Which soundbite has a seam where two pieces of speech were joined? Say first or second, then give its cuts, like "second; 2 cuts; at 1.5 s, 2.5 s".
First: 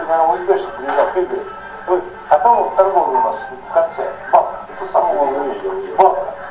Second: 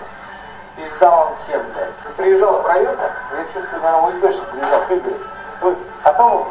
second; 1 cut; at 2.0 s